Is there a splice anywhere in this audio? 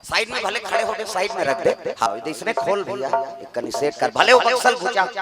yes; 1 cut; at 2.1 s

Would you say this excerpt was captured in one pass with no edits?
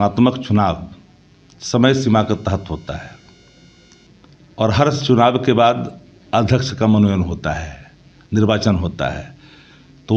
yes; 0 cuts

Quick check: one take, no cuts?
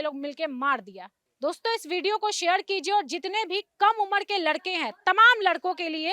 yes; 0 cuts

